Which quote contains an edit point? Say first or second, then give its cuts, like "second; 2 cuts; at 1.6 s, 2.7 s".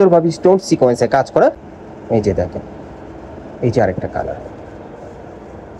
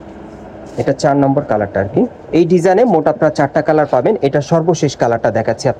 first; 1 cut; at 1.6 s